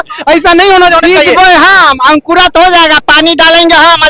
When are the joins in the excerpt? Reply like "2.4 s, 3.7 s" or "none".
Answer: 1.0 s